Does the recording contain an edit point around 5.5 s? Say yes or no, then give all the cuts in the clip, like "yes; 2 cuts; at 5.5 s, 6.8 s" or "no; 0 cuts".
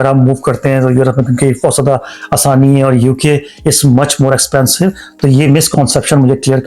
no; 0 cuts